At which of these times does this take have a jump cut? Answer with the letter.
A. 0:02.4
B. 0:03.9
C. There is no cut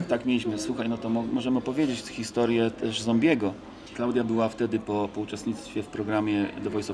B